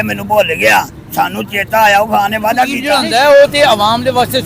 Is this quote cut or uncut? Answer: cut